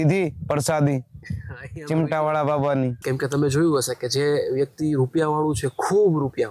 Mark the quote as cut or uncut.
cut